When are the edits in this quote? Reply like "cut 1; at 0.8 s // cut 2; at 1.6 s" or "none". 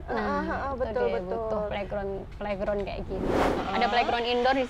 cut 1; at 3.4 s